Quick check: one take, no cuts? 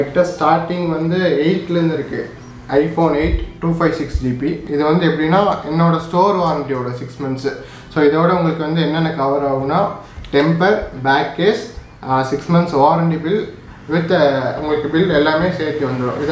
yes; 0 cuts

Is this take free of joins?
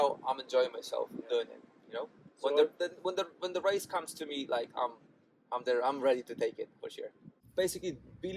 no; 1 cut; at 7.4 s

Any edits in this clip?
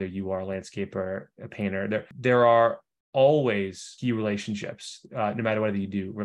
yes; 2 cuts; at 2.1 s, 3.9 s

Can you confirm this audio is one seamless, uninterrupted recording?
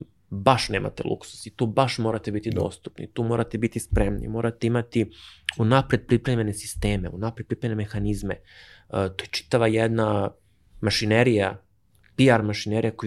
yes; 0 cuts

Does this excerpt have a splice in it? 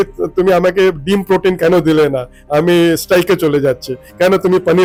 no; 0 cuts

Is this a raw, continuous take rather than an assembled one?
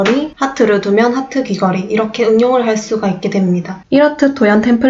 no; 1 cut; at 3.8 s

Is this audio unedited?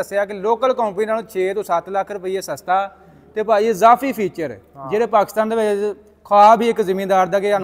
yes; 0 cuts

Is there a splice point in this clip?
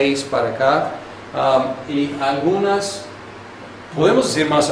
yes; 1 cut; at 2.7 s

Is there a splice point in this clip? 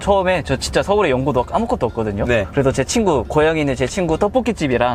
no; 0 cuts

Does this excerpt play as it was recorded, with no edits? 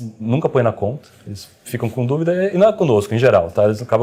yes; 0 cuts

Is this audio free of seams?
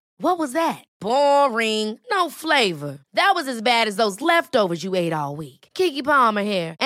yes; 0 cuts

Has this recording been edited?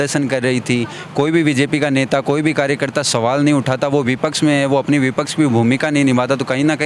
no; 0 cuts

